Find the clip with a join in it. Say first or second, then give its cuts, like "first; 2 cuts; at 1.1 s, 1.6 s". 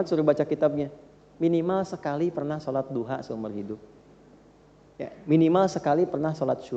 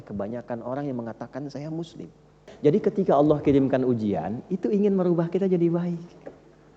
second; 1 cut; at 2.5 s